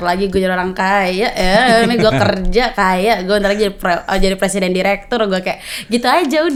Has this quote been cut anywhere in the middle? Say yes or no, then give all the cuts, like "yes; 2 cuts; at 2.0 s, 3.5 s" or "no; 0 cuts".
no; 0 cuts